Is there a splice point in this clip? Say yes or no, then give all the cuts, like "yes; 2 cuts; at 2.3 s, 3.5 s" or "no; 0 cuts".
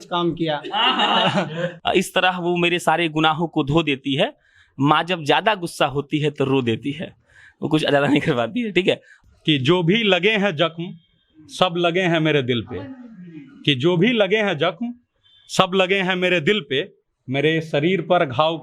yes; 2 cuts; at 1.7 s, 9.1 s